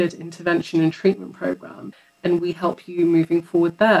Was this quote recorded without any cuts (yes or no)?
no